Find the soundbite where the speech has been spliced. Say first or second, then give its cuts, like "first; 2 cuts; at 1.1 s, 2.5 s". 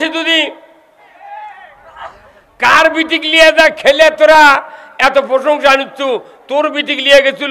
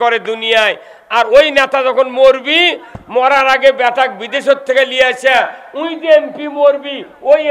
first; 1 cut; at 1.1 s